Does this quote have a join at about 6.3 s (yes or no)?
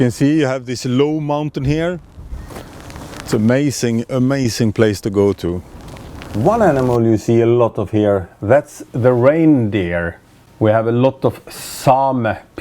yes